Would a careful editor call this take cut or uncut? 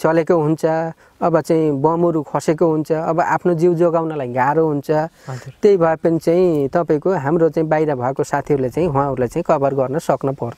uncut